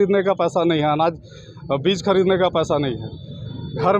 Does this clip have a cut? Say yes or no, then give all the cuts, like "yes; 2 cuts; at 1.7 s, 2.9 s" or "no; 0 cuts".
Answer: no; 0 cuts